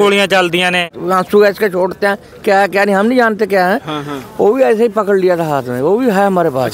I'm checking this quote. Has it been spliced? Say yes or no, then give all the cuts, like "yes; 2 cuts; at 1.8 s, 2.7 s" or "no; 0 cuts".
yes; 1 cut; at 0.9 s